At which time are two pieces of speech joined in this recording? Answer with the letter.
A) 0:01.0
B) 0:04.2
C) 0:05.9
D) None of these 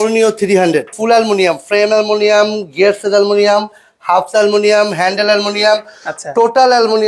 A